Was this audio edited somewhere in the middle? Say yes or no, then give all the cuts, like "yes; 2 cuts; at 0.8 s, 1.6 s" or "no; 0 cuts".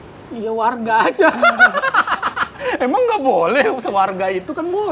no; 0 cuts